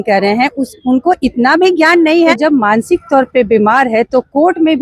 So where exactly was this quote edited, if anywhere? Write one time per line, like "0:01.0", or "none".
0:02.3